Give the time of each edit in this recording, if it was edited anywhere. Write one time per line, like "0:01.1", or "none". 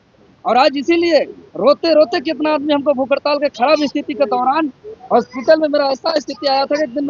none